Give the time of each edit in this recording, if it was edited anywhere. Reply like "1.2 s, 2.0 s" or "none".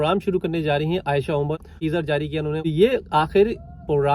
1.7 s, 2.7 s